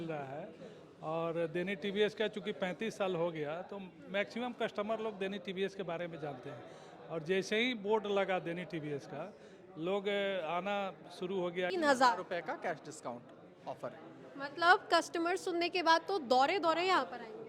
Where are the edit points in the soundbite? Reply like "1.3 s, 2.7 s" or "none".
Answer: 11.7 s